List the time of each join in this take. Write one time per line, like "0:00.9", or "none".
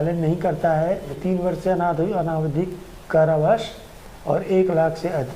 0:01.1